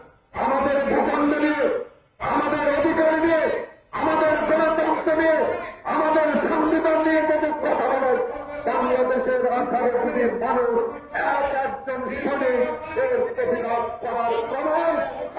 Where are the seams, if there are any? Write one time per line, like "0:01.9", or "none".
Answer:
none